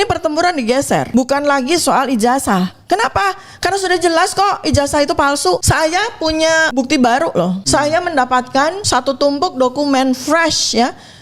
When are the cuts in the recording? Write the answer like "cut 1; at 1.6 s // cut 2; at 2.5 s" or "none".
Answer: cut 1; at 1.1 s // cut 2; at 5.6 s // cut 3; at 6.7 s // cut 4; at 7.6 s // cut 5; at 8.8 s